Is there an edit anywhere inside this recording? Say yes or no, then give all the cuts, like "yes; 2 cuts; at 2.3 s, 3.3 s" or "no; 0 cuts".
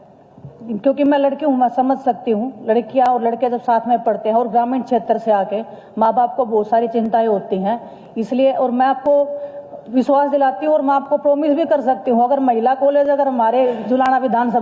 no; 0 cuts